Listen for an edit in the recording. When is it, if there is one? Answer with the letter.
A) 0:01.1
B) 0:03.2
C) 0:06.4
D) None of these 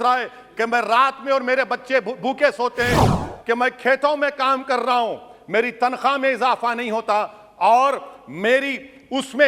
B